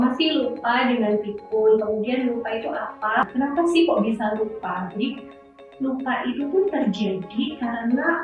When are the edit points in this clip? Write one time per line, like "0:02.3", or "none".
0:03.3